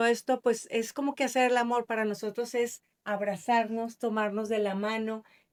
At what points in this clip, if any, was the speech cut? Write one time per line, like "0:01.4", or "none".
none